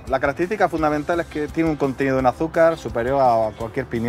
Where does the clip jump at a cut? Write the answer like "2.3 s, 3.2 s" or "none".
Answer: 1.5 s